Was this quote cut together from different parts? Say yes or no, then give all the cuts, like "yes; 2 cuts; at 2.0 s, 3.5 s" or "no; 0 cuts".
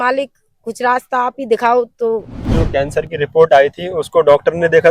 yes; 1 cut; at 2.5 s